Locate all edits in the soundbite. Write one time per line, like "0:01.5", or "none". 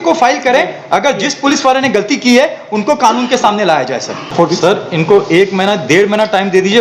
0:04.2